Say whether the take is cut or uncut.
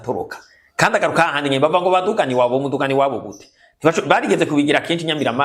uncut